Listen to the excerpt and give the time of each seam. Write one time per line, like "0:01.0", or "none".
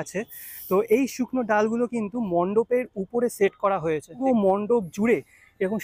none